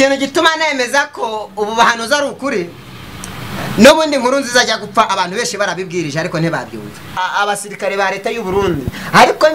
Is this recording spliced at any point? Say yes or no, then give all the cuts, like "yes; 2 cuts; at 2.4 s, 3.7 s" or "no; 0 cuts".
yes; 1 cut; at 7.2 s